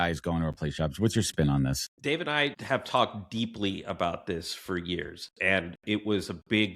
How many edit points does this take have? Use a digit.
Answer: 1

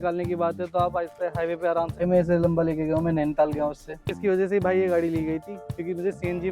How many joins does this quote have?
2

